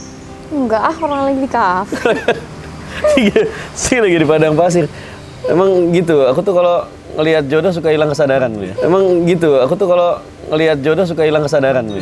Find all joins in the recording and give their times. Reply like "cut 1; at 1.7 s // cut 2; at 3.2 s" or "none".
none